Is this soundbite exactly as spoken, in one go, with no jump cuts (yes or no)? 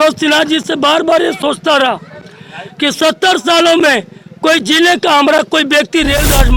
yes